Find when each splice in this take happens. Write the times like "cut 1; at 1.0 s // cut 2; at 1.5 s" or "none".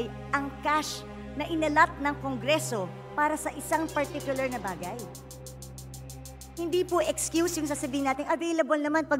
none